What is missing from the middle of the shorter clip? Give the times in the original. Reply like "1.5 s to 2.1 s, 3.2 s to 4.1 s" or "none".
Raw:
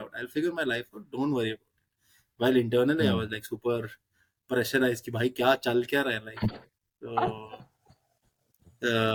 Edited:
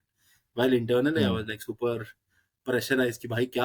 none